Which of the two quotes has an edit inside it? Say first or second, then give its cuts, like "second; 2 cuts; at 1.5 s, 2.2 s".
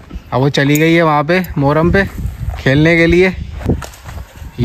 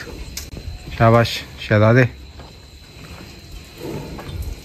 first; 1 cut; at 3.6 s